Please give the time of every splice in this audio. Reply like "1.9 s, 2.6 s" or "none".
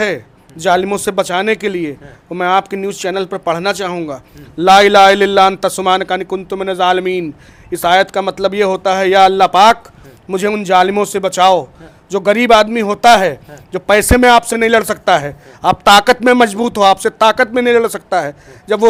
none